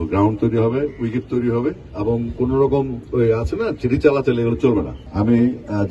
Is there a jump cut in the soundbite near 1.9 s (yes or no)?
yes